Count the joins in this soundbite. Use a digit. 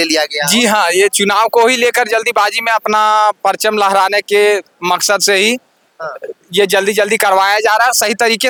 0